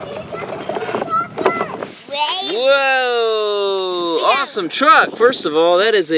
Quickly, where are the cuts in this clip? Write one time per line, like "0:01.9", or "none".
0:01.7